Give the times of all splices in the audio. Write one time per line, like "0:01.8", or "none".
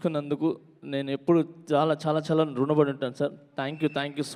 none